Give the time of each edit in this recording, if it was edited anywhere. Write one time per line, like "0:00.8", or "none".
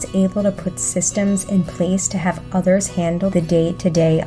none

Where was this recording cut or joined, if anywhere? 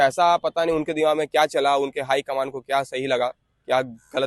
none

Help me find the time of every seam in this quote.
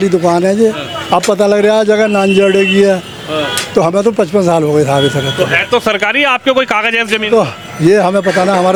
none

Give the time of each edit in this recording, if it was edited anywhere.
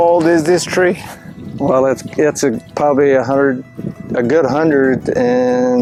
none

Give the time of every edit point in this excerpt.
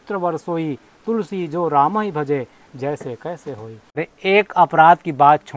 0:03.9

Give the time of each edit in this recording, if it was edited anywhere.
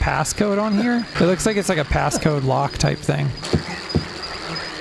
0:01.1
0:03.4

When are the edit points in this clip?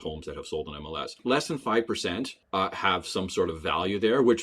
0:01.2

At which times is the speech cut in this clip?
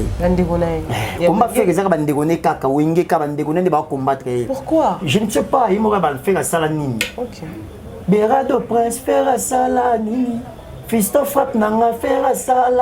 none

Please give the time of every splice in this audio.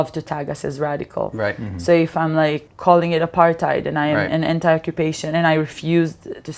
0:02.7

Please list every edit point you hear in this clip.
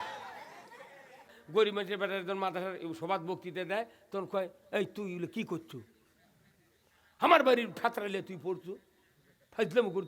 0:01.3

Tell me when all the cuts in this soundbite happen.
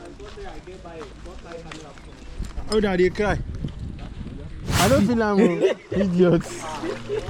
0:04.8

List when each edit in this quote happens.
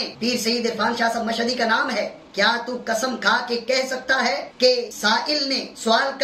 none

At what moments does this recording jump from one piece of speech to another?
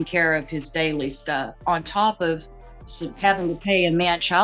none

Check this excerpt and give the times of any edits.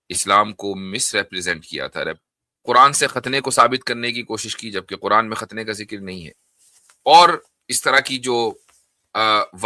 0:02.2

